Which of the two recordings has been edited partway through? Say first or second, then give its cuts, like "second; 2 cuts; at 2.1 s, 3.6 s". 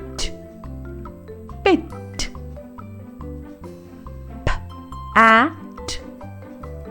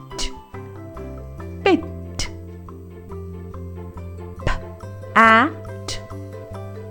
first; 2 cuts; at 2.2 s, 4.4 s